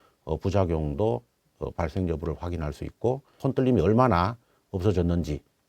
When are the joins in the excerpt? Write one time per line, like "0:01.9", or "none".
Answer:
0:03.3